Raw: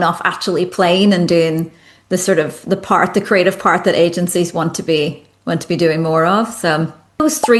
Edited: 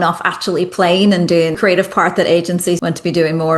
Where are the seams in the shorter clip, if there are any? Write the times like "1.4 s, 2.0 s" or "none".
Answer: 1.6 s, 2.8 s